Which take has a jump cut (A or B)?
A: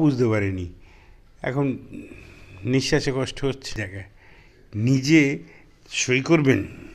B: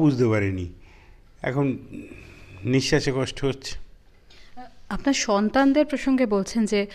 A